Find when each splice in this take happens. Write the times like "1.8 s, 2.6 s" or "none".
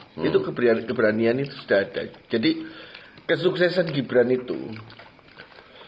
none